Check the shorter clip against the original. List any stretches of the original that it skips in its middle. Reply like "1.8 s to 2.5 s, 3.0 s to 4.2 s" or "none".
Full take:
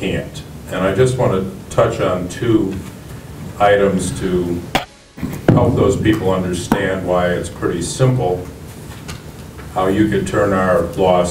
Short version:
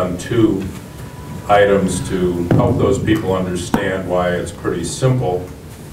4.5 s to 5.4 s